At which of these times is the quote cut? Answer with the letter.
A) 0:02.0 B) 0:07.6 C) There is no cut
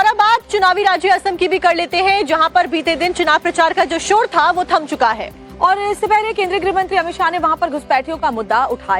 A